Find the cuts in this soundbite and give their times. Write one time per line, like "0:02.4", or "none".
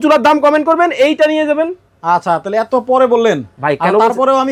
none